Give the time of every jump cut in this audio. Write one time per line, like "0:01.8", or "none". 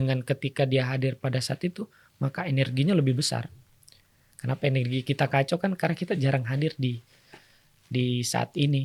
none